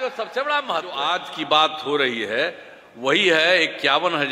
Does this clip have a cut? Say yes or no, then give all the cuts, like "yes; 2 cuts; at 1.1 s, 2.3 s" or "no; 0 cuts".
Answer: yes; 1 cut; at 1.0 s